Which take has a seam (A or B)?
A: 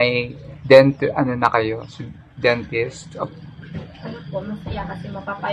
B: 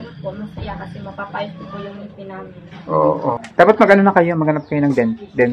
B